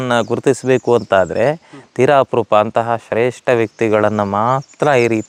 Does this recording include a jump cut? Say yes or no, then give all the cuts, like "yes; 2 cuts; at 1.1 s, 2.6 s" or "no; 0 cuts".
no; 0 cuts